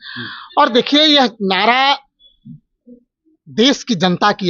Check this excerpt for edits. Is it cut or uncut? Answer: uncut